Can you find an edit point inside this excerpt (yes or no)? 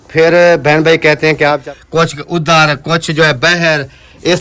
yes